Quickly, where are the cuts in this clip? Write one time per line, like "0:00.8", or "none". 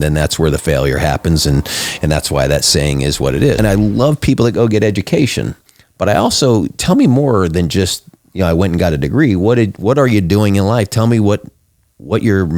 0:03.6